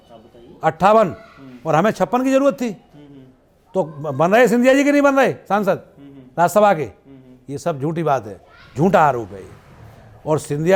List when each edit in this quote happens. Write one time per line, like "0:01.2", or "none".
none